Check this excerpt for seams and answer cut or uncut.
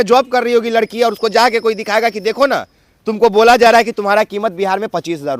uncut